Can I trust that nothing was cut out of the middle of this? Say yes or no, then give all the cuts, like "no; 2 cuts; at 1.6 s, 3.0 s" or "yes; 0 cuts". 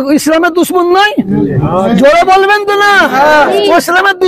yes; 0 cuts